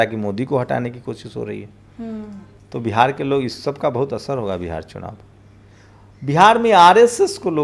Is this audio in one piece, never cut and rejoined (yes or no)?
yes